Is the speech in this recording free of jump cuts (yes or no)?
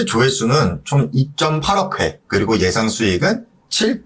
no